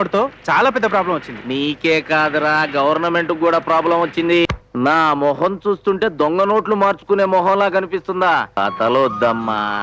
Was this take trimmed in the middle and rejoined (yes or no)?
yes